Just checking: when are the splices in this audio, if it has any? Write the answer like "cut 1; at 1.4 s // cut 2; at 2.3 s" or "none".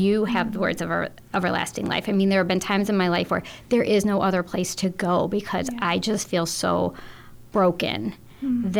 none

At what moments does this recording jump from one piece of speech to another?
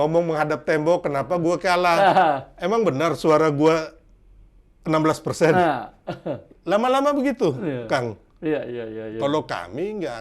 none

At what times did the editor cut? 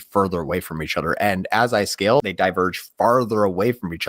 cut 1; at 2.3 s

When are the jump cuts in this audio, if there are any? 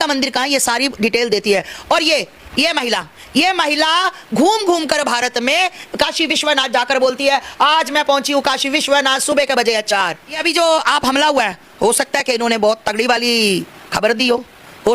cut 1; at 10.3 s

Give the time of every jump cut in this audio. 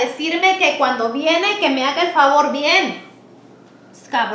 none

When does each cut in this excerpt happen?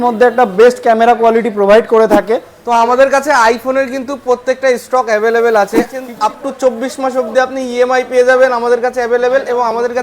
cut 1; at 2.5 s // cut 2; at 6.0 s

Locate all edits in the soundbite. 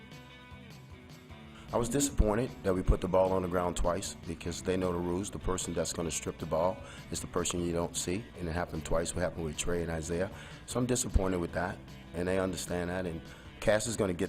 cut 1; at 1.7 s

